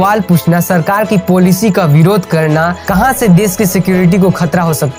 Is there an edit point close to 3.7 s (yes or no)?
no